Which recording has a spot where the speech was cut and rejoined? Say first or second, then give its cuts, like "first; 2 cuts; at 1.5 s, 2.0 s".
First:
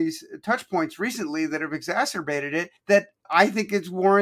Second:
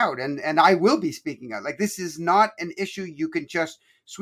first; 1 cut; at 3.0 s